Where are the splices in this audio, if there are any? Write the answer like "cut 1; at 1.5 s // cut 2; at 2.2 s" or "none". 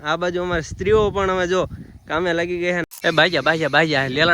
cut 1; at 2.8 s